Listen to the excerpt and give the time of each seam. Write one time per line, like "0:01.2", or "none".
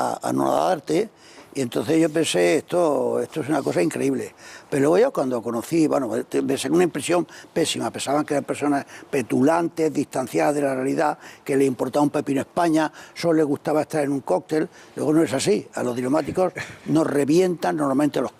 none